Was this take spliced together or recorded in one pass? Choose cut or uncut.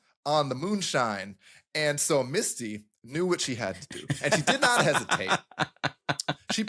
uncut